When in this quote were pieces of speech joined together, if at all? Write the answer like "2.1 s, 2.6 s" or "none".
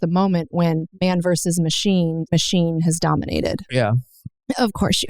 0.9 s, 2.2 s, 3.7 s